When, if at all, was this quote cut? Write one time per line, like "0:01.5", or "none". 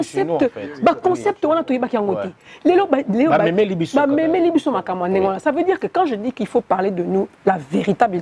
none

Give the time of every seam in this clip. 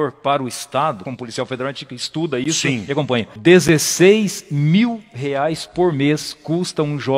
0:01.0
0:03.3

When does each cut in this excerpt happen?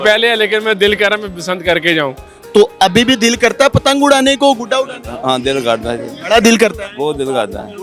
0:02.3

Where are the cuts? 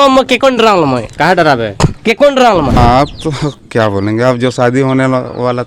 0:02.8

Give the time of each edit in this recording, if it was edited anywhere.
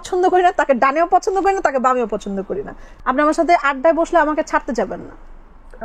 0:02.8

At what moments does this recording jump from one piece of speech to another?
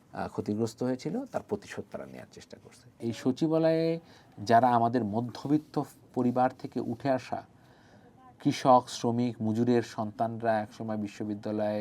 0:02.9

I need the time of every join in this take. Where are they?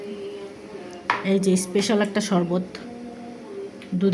none

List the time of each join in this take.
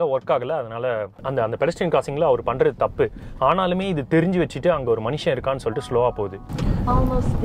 0:01.2
0:06.5

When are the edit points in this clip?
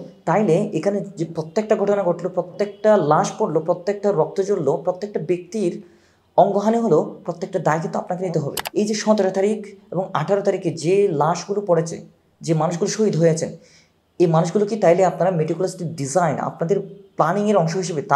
0:08.6

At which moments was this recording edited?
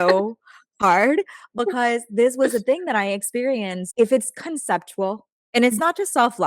0:03.8

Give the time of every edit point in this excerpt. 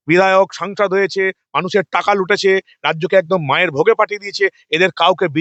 none

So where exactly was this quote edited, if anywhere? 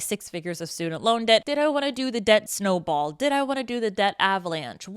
0:01.5
0:02.5

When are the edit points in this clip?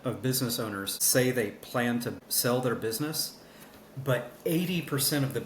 0:00.9
0:02.2

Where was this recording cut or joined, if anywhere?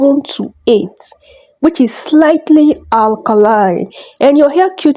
none

